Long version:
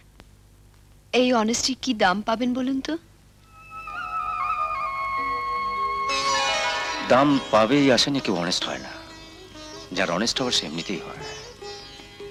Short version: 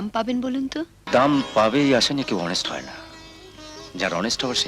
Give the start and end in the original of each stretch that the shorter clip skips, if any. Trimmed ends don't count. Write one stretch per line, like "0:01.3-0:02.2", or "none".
0:03.1-0:06.9